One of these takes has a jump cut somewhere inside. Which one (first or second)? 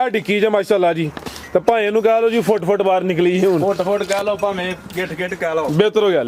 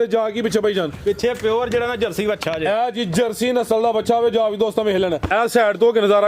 second